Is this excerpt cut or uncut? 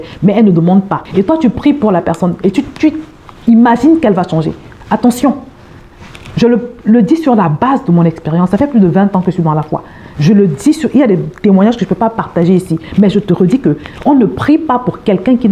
cut